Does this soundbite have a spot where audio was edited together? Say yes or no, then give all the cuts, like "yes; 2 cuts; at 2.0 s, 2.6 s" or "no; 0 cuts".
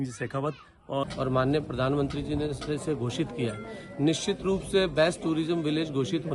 yes; 1 cut; at 1.1 s